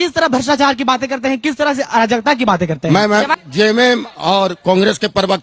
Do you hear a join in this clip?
yes; 1 cut; at 2.8 s

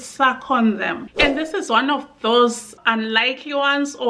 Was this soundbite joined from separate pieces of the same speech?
yes; 1 cut; at 1.0 s

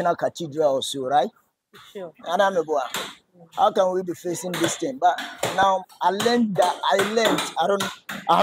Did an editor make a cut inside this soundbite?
no; 0 cuts

